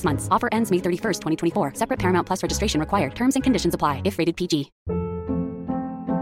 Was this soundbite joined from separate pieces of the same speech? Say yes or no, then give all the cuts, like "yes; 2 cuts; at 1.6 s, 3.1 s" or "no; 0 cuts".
yes; 1 cut; at 4.8 s